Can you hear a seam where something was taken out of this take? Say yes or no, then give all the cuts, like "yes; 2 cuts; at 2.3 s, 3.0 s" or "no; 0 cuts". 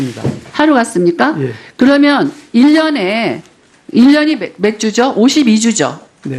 no; 0 cuts